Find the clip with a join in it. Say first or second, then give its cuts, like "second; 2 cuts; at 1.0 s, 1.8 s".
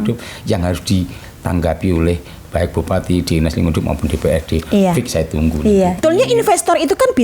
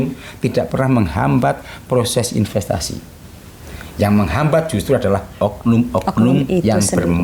first; 1 cut; at 6.0 s